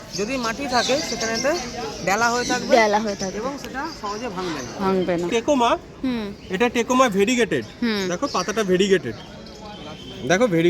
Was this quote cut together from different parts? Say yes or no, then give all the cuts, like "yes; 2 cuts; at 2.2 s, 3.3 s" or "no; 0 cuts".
yes; 1 cut; at 5.3 s